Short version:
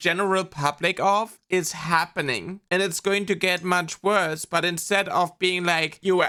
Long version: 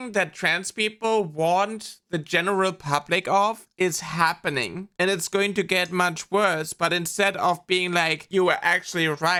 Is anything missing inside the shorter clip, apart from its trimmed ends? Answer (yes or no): no